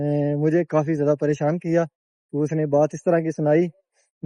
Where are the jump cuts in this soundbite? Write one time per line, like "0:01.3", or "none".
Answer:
none